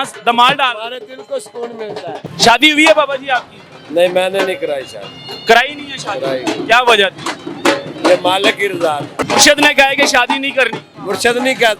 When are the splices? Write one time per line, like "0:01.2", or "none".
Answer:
0:02.3
0:09.1
0:10.9

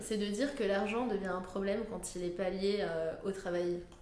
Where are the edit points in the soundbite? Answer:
none

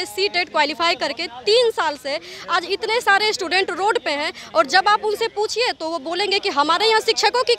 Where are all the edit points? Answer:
none

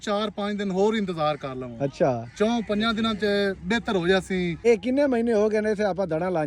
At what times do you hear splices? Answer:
0:04.6

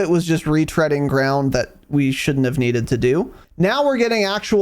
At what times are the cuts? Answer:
0:03.4

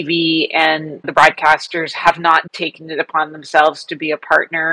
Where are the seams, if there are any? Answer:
0:01.1
0:02.5

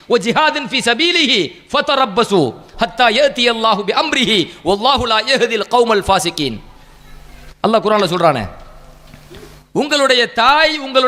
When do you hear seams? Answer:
none

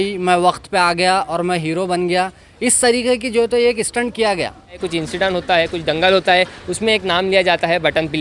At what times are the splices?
0:04.8

